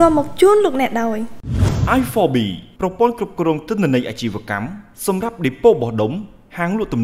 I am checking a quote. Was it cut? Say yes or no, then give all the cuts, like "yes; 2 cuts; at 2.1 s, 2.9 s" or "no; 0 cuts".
no; 0 cuts